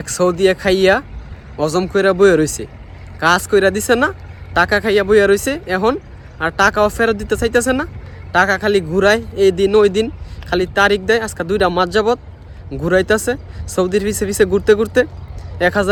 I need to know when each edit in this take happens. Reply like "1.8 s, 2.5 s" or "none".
none